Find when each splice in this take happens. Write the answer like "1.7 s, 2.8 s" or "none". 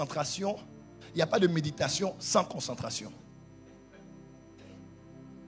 none